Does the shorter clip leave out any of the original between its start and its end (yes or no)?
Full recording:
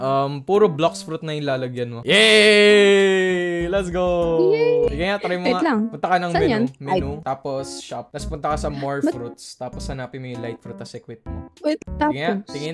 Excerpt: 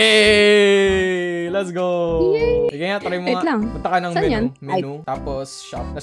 no